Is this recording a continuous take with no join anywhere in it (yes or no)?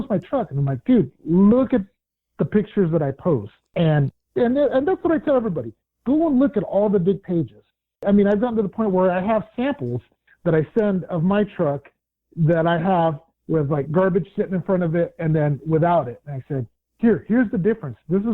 no